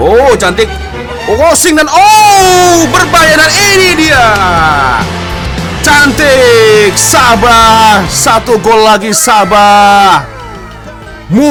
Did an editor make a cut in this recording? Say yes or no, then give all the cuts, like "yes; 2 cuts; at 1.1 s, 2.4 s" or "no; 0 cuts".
no; 0 cuts